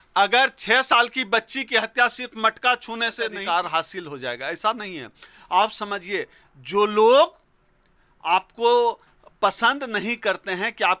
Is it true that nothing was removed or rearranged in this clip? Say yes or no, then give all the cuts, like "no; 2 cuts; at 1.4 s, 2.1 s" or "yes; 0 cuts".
no; 1 cut; at 3.4 s